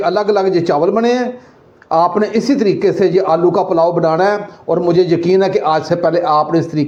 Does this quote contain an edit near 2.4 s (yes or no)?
no